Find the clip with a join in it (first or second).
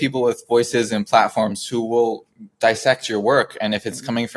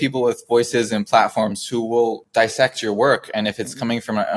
second